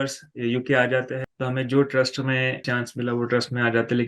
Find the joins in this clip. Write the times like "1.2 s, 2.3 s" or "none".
1.2 s, 2.6 s